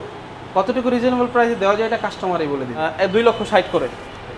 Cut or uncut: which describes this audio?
cut